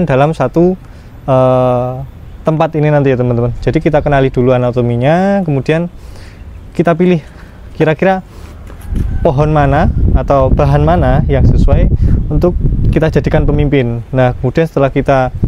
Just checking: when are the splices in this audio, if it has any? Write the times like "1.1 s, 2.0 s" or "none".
none